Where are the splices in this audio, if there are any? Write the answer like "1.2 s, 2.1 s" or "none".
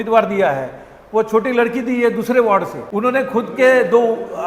2.8 s